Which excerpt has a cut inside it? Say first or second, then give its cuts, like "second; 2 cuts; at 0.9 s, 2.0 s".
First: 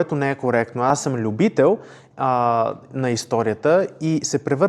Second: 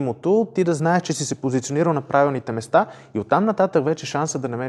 first; 1 cut; at 0.9 s